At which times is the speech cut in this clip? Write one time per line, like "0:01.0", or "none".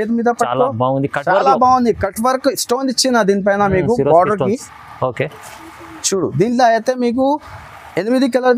none